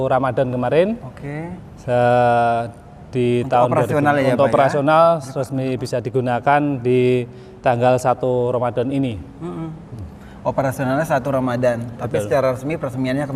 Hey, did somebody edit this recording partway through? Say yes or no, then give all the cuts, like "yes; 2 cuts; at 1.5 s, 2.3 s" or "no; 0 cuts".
no; 0 cuts